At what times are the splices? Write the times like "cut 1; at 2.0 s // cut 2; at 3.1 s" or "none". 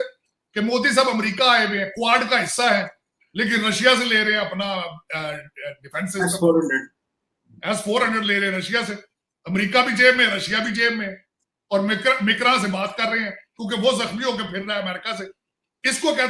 none